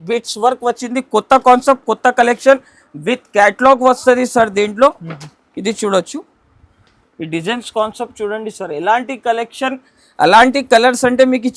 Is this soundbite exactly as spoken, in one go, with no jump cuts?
yes; 0 cuts

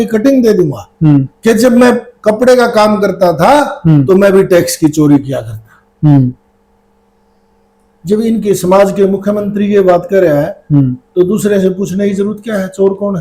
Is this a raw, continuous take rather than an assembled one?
yes; 0 cuts

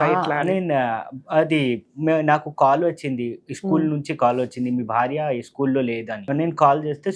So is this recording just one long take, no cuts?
no; 1 cut; at 6.2 s

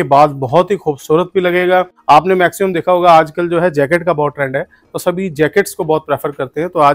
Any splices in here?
yes; 1 cut; at 1.9 s

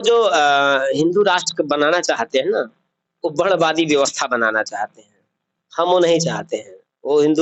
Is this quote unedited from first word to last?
yes; 0 cuts

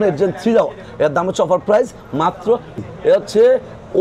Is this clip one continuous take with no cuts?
no; 1 cut; at 2.8 s

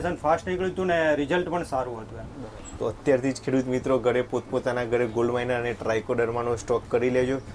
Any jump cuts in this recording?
yes; 1 cut; at 2.2 s

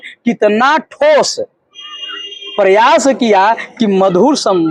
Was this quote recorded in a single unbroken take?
yes; 0 cuts

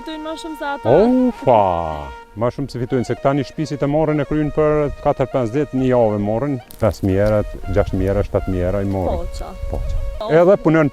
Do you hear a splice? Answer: yes; 4 cuts; at 2.2 s, 5.0 s, 6.7 s, 10.2 s

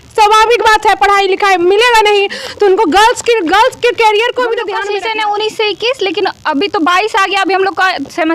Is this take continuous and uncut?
no; 1 cut; at 4.8 s

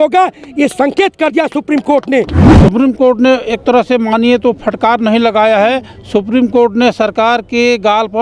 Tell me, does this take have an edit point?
yes; 1 cut; at 2.5 s

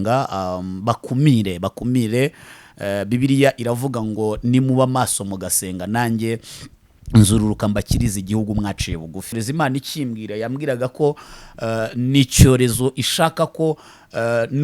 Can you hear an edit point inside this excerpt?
yes; 1 cut; at 9.4 s

